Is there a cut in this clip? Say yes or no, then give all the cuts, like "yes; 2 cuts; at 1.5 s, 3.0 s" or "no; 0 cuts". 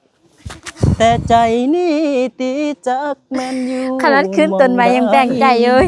no; 0 cuts